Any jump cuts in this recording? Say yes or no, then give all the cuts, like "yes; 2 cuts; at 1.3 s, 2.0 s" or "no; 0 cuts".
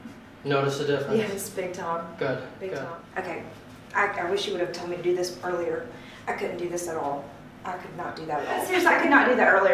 yes; 2 cuts; at 2.9 s, 8.7 s